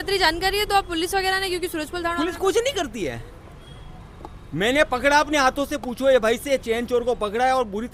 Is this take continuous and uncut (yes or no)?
yes